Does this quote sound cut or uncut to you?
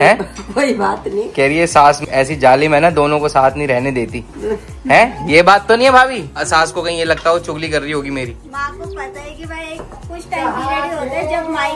uncut